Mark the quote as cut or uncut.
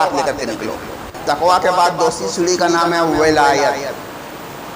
cut